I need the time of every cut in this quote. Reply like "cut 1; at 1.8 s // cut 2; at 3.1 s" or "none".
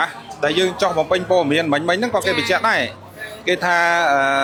none